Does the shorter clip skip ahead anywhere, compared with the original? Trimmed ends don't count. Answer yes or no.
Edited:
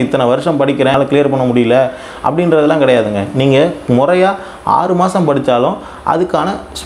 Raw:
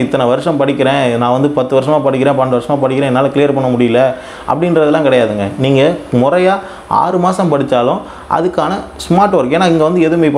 yes